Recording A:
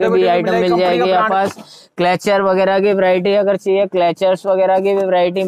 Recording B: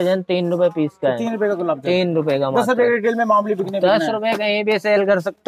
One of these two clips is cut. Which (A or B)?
A